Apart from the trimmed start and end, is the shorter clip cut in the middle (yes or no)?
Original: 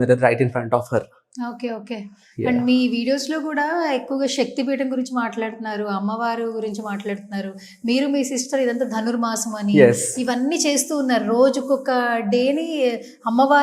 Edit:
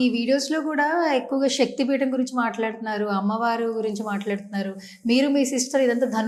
no